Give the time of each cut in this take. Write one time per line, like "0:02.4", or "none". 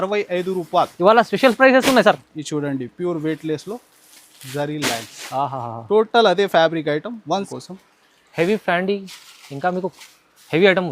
0:07.5